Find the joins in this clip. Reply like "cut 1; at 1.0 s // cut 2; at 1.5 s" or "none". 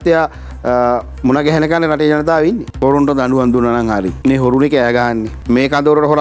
cut 1; at 2.7 s // cut 2; at 4.1 s // cut 3; at 5.3 s